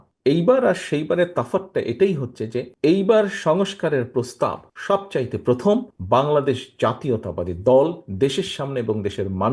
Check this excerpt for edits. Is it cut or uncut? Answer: uncut